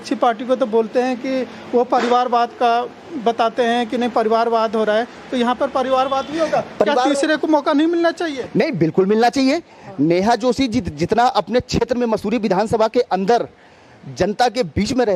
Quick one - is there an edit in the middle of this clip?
no; 0 cuts

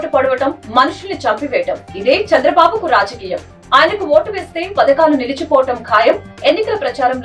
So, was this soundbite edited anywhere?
no; 0 cuts

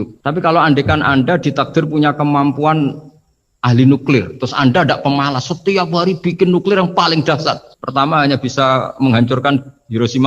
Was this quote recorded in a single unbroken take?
yes; 0 cuts

